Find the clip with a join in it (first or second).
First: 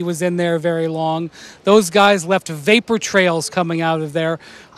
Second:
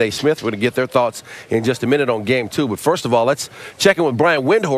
first